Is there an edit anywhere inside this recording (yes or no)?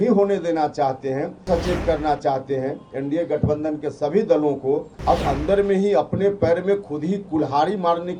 yes